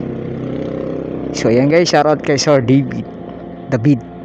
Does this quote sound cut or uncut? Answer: uncut